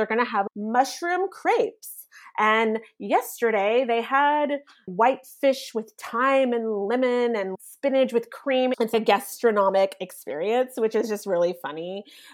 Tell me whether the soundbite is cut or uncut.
cut